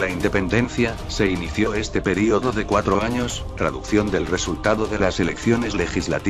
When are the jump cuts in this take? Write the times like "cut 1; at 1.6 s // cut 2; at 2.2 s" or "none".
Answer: cut 1; at 1.5 s